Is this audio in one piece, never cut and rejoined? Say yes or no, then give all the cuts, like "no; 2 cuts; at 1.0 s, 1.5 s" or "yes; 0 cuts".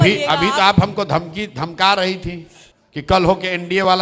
yes; 0 cuts